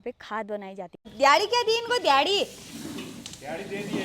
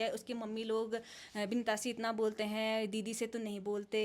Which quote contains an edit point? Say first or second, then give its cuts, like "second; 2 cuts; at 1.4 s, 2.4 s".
first; 1 cut; at 1.1 s